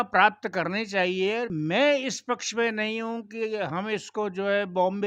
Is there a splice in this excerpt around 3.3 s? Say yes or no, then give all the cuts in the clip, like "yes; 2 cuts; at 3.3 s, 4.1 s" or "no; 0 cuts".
no; 1 cut; at 1.5 s